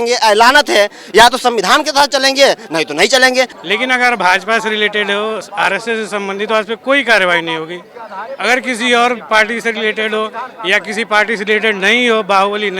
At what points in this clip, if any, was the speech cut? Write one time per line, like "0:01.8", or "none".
0:03.5